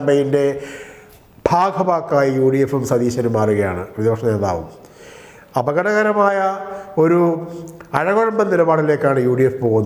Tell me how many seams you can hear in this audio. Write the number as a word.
zero